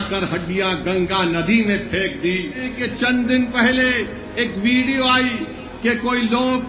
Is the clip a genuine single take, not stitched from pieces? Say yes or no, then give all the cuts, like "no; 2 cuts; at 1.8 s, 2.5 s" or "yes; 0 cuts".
no; 1 cut; at 2.8 s